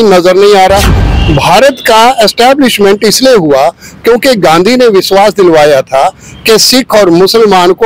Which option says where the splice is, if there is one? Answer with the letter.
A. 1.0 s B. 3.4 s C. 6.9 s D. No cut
A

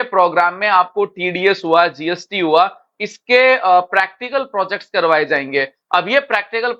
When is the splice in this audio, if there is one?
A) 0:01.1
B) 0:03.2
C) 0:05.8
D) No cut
D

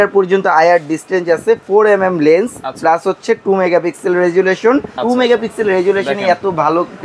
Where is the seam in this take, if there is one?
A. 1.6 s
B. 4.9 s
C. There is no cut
B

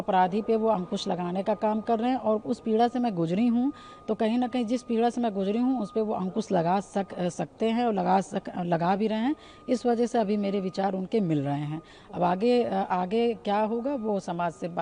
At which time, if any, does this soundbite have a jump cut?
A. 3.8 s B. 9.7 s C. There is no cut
C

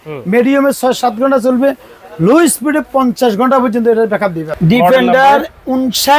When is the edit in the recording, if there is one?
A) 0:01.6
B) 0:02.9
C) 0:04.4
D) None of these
C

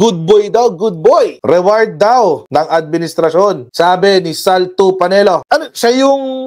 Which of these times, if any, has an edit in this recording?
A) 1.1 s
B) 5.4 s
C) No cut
B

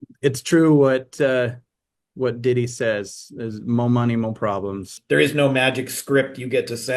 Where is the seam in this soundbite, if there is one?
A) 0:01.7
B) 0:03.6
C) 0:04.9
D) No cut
C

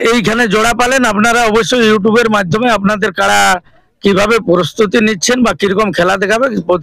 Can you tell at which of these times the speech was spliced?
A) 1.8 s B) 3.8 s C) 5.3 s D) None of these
D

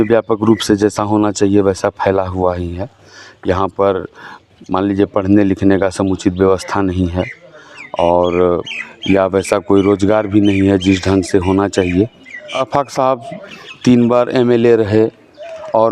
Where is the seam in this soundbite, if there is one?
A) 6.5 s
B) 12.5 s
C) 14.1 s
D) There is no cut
B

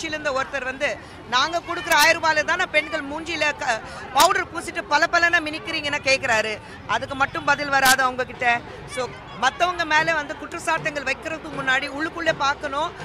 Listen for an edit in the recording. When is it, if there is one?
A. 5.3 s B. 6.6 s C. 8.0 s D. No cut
D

